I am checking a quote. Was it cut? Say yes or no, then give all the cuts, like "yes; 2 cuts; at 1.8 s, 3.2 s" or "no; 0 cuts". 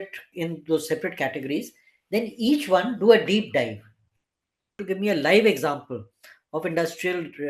yes; 1 cut; at 4.8 s